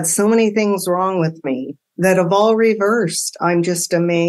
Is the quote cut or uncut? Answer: uncut